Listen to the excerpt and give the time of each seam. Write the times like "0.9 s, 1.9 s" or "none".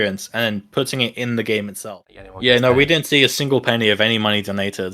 1.8 s